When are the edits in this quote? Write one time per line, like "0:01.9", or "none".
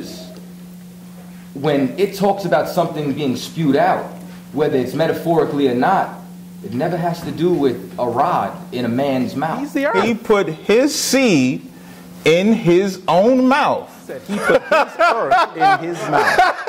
0:09.7
0:14.3